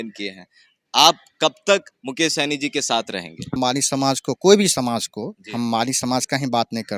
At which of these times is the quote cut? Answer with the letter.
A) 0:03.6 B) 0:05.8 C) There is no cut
A